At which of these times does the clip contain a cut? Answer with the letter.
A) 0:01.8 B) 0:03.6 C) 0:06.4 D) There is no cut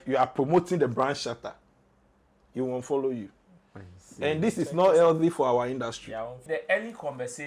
C